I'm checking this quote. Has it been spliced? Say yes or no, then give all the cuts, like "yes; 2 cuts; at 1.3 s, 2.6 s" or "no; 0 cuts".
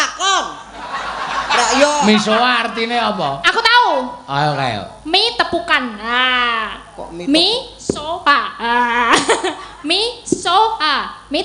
no; 0 cuts